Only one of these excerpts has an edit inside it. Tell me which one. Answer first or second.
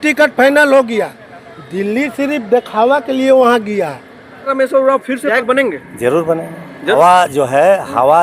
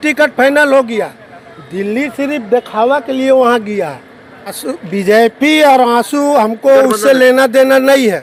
first